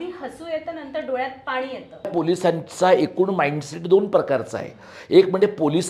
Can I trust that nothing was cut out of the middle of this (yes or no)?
no